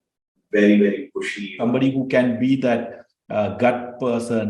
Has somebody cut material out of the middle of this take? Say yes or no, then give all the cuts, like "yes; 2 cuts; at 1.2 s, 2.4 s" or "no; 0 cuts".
yes; 1 cut; at 1.5 s